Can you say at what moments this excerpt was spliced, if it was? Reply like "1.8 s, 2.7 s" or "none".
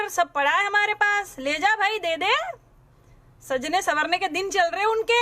none